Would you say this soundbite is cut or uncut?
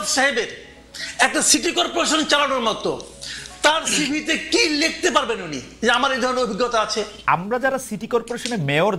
cut